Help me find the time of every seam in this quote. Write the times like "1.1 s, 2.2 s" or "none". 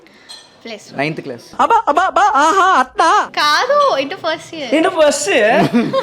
none